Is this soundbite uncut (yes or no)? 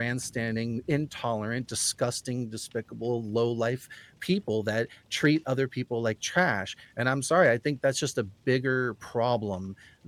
yes